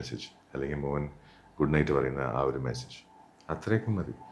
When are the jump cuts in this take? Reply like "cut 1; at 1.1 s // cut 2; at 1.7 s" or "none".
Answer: none